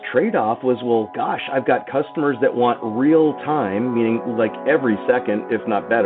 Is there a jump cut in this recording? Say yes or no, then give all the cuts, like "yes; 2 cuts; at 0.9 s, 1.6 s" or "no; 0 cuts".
no; 0 cuts